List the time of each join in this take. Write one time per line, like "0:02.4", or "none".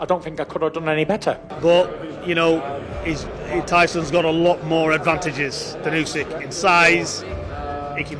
0:01.5